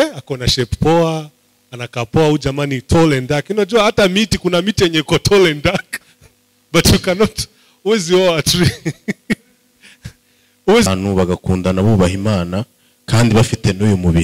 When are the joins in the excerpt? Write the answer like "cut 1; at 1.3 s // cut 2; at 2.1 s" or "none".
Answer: cut 1; at 10.9 s